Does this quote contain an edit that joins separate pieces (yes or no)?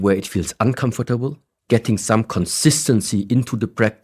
yes